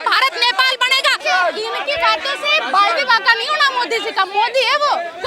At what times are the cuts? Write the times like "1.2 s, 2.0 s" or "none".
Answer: 1.2 s